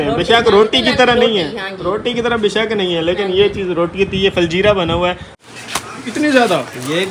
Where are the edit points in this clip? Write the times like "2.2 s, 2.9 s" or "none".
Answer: 5.4 s